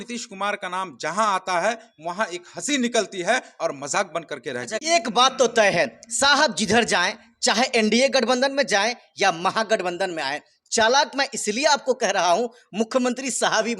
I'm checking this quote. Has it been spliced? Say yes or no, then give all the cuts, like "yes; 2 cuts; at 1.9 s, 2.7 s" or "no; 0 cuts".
yes; 1 cut; at 4.8 s